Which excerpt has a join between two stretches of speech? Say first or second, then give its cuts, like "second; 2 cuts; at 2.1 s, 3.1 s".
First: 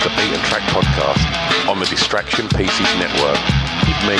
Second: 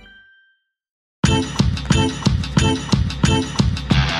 second; 1 cut; at 1.2 s